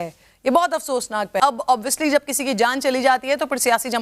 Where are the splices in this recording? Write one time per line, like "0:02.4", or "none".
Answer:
0:01.3